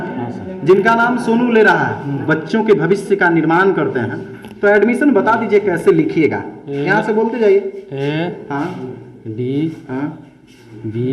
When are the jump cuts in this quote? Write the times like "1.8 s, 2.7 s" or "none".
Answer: 2.2 s

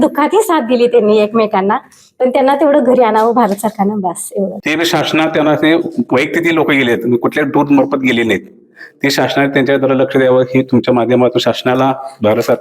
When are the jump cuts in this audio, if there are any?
4.6 s

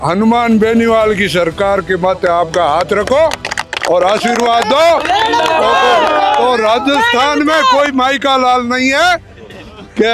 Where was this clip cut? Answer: none

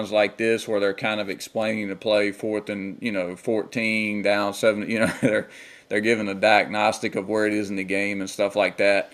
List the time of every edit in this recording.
none

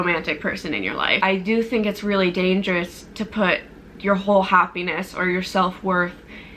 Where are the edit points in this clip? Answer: 1.2 s

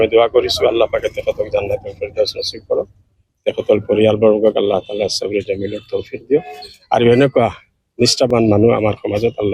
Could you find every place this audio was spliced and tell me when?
8.3 s

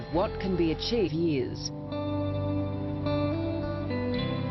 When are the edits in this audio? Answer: none

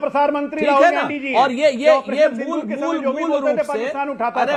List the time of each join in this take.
none

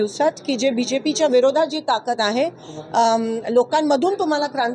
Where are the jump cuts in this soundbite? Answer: none

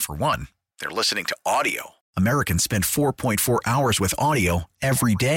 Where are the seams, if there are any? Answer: none

